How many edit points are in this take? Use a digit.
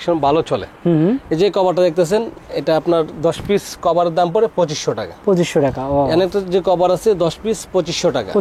0